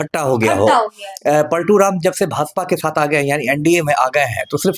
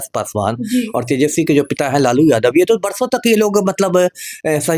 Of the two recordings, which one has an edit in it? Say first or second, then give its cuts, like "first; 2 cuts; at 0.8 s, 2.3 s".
first; 1 cut; at 1.0 s